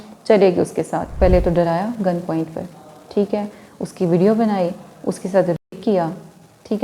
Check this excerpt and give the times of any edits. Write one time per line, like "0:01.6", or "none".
0:01.1